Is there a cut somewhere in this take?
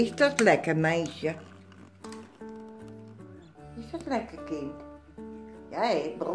no; 0 cuts

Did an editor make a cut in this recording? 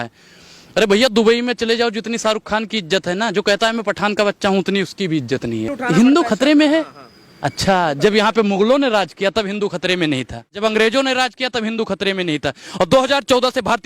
yes; 2 cuts; at 5.8 s, 10.6 s

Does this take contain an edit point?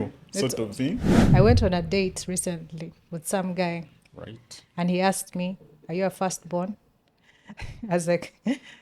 yes; 1 cut; at 1.1 s

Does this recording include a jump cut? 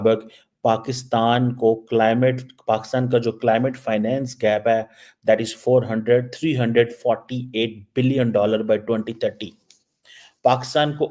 no; 0 cuts

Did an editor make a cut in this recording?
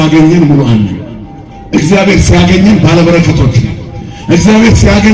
no; 0 cuts

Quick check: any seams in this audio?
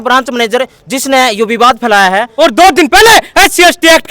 yes; 1 cut; at 2.3 s

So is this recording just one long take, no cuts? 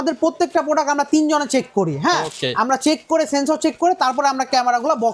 yes; 0 cuts

